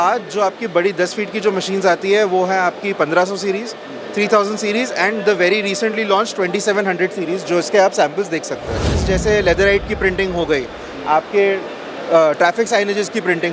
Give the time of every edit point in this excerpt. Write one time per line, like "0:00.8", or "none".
0:08.9

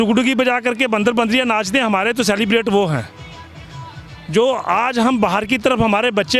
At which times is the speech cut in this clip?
none

